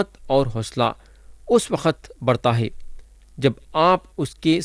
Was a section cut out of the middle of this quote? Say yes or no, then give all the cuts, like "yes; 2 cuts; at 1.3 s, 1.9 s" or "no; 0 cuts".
no; 0 cuts